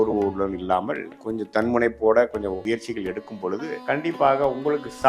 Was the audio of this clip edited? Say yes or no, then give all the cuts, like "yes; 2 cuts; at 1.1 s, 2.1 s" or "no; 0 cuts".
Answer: yes; 2 cuts; at 2.6 s, 3.8 s